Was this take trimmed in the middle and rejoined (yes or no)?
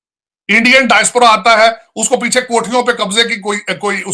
no